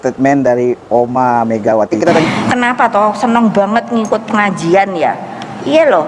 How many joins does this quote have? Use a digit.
1